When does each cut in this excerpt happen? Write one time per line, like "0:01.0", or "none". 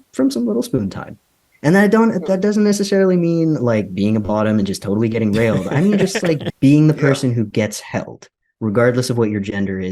0:06.4